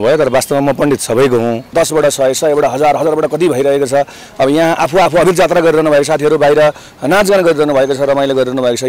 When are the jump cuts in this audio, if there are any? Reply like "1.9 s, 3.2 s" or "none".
1.7 s